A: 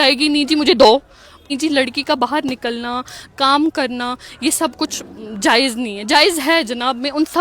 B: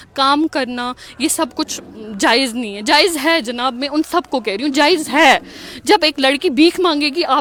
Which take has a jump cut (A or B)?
A